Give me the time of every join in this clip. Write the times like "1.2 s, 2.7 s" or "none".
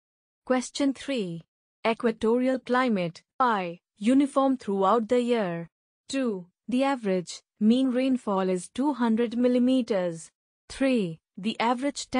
3.5 s

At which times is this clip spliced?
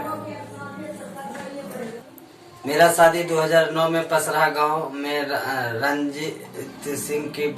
2.0 s

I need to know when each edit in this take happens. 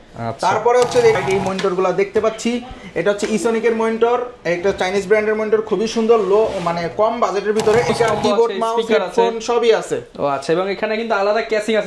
1.1 s, 7.9 s

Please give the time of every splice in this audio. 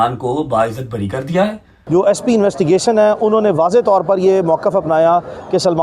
1.7 s

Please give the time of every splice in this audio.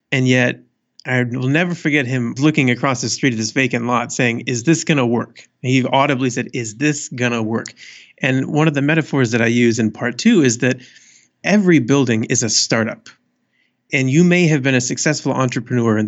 2.3 s

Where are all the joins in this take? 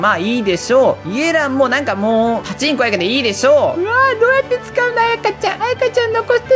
2.5 s, 3.8 s

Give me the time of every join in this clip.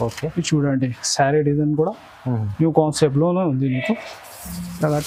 none

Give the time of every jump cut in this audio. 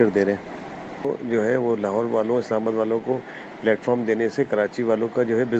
1.1 s

